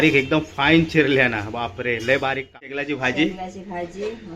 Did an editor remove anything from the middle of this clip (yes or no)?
yes